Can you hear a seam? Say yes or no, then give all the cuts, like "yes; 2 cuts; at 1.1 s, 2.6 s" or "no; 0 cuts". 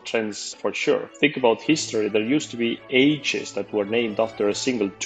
yes; 1 cut; at 1.1 s